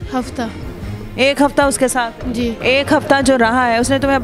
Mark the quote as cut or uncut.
cut